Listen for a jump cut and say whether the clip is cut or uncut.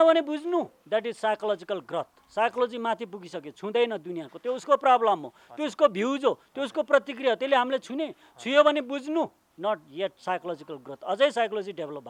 uncut